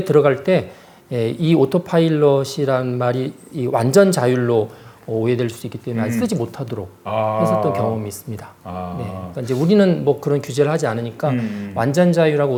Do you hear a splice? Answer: no; 0 cuts

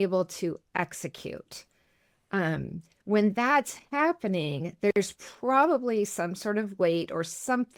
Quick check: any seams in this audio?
no; 0 cuts

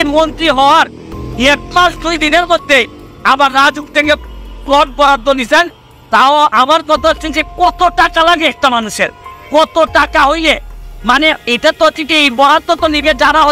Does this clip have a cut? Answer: no; 0 cuts

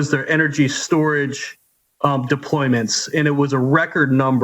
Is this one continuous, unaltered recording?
yes; 0 cuts

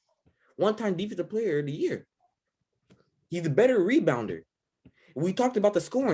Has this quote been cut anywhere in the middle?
no; 0 cuts

